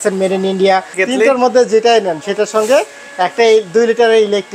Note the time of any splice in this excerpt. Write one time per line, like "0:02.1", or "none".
0:00.9